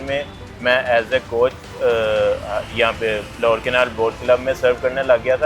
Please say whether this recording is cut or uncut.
uncut